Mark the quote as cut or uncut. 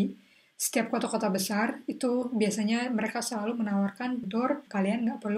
cut